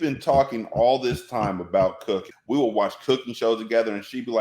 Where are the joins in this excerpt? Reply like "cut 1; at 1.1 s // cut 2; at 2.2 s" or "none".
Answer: cut 1; at 2.3 s